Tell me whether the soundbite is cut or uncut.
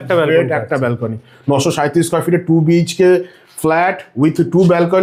uncut